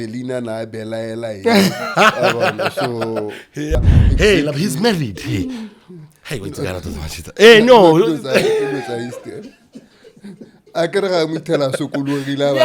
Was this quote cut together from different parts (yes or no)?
yes